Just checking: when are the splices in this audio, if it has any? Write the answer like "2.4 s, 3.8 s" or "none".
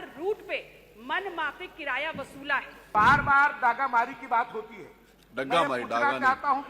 2.9 s